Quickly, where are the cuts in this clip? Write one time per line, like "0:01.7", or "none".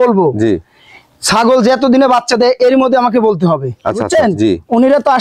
0:04.0

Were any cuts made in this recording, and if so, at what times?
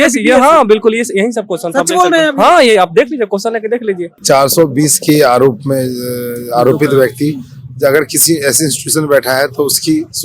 0:04.2

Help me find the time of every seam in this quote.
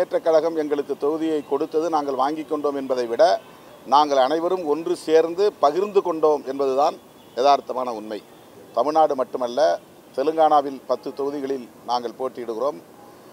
0:08.5

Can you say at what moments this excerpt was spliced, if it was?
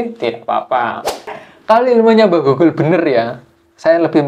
0:01.4

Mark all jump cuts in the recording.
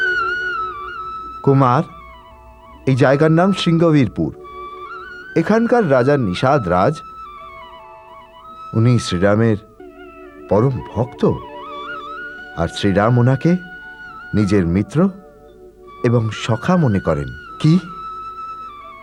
none

